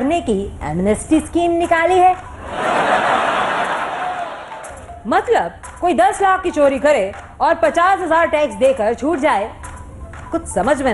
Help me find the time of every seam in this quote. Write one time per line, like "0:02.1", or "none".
none